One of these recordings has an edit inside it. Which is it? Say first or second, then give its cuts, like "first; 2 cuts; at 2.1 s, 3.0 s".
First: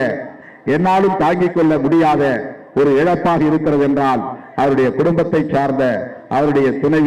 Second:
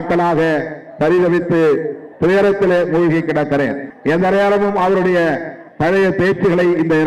second; 1 cut; at 3.9 s